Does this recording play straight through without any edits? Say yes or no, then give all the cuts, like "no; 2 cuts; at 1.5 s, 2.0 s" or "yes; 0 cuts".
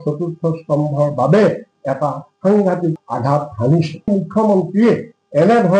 no; 1 cut; at 4.0 s